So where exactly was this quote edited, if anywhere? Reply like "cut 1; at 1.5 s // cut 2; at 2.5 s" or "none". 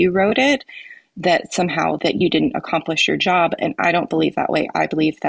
cut 1; at 2.0 s